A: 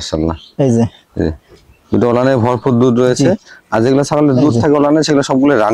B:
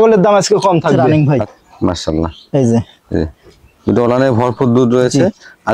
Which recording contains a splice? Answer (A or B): B